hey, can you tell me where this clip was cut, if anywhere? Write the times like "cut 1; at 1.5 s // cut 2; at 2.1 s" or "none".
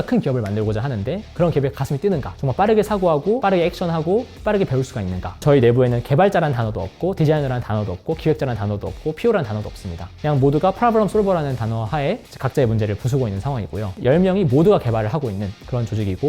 cut 1; at 1.2 s // cut 2; at 2.4 s // cut 3; at 5.4 s